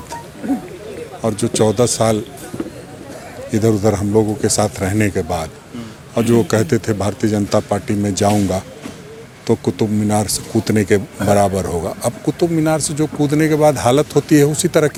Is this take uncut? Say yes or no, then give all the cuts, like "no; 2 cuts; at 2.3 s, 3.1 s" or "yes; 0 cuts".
yes; 0 cuts